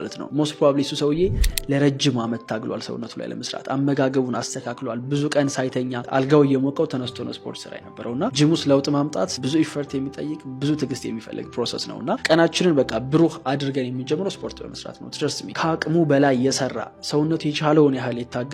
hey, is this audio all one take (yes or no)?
yes